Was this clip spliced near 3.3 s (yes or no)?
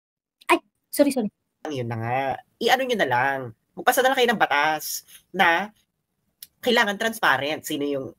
no